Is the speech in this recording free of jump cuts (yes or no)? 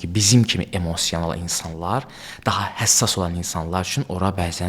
yes